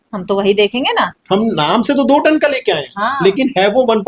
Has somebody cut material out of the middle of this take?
yes; 1 cut; at 1.2 s

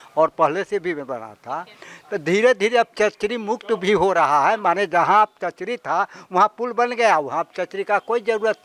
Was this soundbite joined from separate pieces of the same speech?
no; 0 cuts

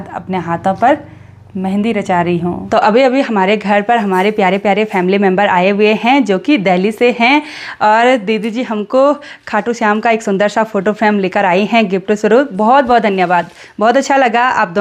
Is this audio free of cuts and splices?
yes; 0 cuts

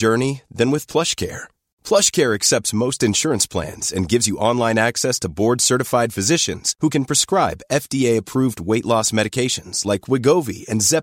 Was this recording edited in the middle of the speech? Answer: no; 0 cuts

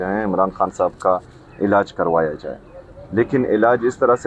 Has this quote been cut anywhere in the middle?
no; 0 cuts

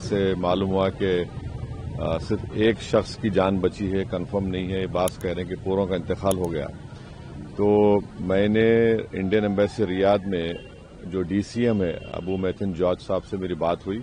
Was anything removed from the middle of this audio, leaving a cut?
no; 0 cuts

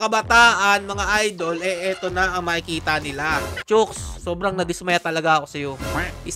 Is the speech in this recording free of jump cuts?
no; 1 cut; at 3.6 s

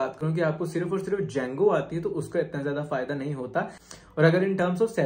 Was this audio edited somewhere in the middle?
yes; 1 cut; at 3.8 s

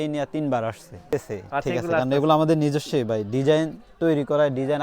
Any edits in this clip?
yes; 1 cut; at 1.0 s

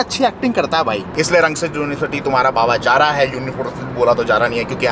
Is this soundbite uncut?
yes; 0 cuts

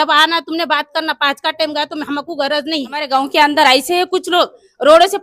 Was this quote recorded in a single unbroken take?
no; 1 cut; at 3.1 s

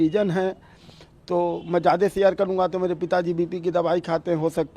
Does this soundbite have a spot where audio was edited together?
no; 0 cuts

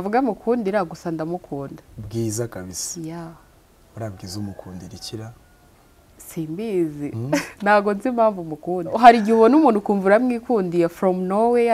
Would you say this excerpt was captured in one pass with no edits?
no; 2 cuts; at 1.9 s, 9.0 s

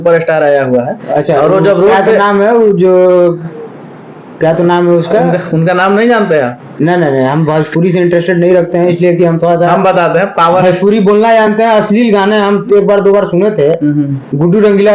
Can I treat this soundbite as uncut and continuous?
yes; 0 cuts

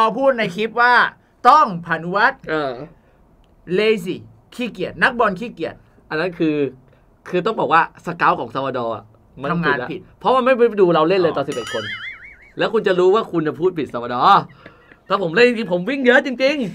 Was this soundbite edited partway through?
no; 0 cuts

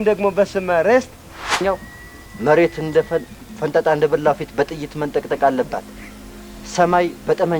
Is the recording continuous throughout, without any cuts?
no; 1 cut; at 1.4 s

